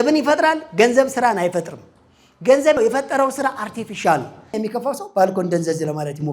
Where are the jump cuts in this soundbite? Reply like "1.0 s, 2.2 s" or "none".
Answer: 2.8 s, 4.5 s